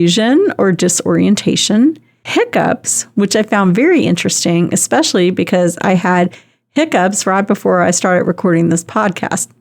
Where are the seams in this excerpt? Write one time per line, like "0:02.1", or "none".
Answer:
none